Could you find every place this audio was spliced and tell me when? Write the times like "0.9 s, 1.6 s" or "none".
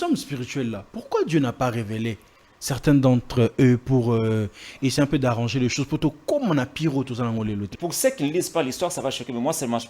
7.7 s